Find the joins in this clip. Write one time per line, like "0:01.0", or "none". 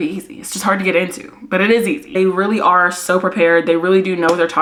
none